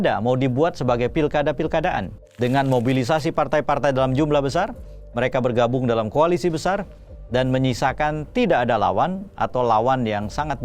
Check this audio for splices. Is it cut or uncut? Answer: uncut